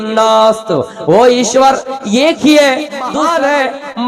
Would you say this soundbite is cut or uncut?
cut